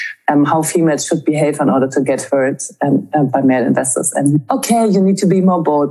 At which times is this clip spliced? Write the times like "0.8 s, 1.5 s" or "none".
3.3 s, 4.4 s